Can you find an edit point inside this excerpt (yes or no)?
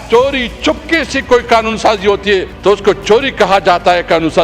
yes